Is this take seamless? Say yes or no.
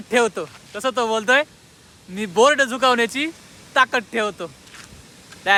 yes